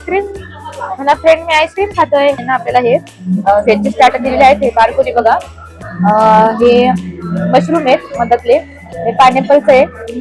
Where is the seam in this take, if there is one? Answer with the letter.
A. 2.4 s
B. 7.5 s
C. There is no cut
A